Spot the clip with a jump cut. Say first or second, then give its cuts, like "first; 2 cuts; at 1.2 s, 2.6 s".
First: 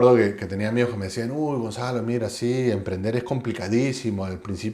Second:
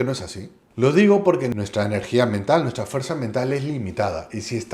second; 1 cut; at 1.5 s